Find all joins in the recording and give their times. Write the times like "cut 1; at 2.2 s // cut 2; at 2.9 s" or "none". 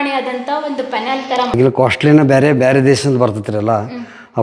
cut 1; at 1.6 s